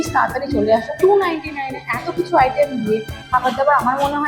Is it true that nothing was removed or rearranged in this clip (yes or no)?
no